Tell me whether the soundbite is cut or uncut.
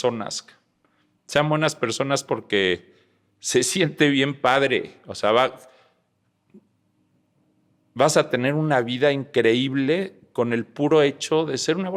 uncut